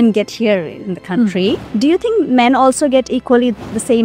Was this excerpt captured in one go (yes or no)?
no